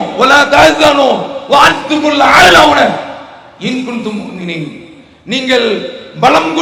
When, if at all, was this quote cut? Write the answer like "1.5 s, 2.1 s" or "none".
none